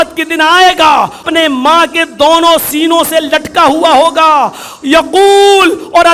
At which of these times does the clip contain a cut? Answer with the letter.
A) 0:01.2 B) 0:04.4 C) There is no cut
A